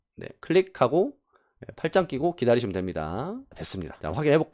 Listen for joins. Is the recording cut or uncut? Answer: uncut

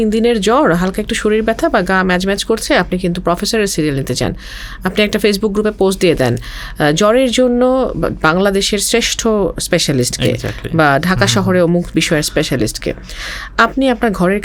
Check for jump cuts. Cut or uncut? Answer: uncut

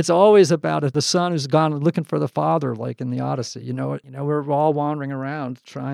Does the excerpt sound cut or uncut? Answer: cut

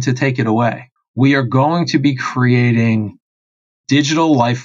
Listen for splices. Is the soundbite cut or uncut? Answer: cut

